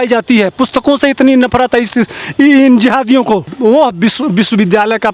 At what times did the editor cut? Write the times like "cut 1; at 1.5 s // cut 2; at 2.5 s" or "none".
cut 1; at 3.5 s